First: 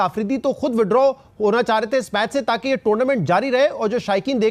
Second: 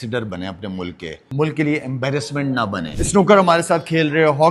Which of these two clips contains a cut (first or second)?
second